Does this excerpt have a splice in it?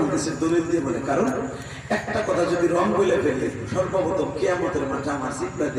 no; 0 cuts

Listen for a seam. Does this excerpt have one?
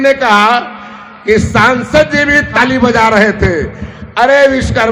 yes; 1 cut; at 2.5 s

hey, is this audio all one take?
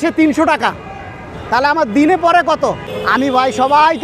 no; 1 cut; at 2.6 s

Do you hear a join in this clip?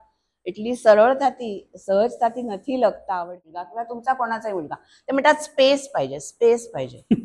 yes; 1 cut; at 3.8 s

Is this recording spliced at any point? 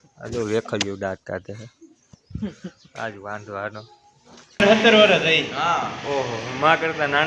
yes; 1 cut; at 4.6 s

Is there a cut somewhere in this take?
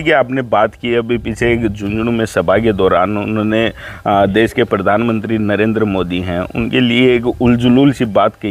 no; 0 cuts

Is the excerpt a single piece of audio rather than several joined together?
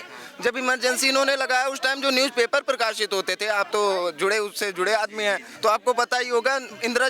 yes; 0 cuts

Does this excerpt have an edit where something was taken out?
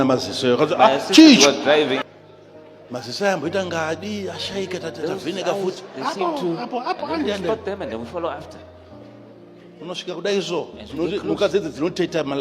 yes; 1 cut; at 2.1 s

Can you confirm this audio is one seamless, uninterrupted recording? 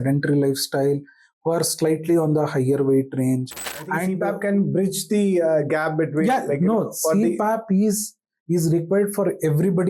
no; 1 cut; at 4.2 s

